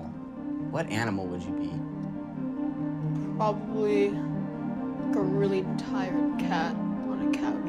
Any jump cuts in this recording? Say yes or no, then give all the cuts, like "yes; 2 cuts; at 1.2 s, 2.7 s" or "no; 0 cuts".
yes; 1 cut; at 5.4 s